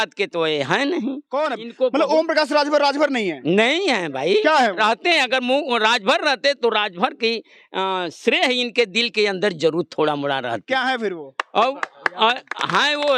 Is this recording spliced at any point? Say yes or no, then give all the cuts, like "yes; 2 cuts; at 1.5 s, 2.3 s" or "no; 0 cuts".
no; 0 cuts